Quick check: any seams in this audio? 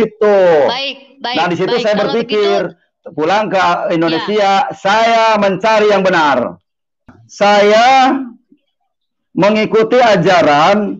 yes; 1 cut; at 7.3 s

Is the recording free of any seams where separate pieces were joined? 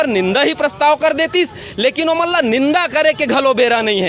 yes; 0 cuts

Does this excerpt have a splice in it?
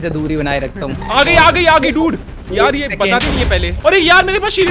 yes; 2 cuts; at 1.1 s, 3.8 s

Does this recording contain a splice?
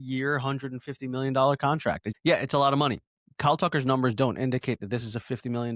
no; 0 cuts

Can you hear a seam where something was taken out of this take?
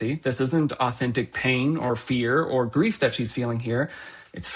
no; 0 cuts

